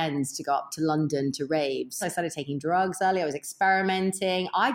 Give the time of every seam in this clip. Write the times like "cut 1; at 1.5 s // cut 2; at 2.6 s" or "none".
cut 1; at 2.0 s